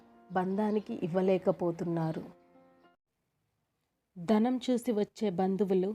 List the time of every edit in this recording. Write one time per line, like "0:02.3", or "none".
0:03.1